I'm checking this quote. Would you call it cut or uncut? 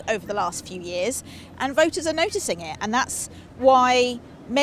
uncut